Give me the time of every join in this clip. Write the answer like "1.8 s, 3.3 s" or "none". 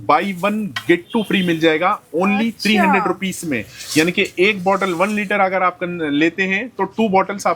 none